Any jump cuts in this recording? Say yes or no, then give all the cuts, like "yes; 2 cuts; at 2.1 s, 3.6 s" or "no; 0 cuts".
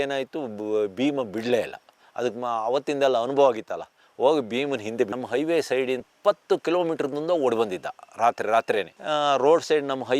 yes; 2 cuts; at 5.2 s, 6.1 s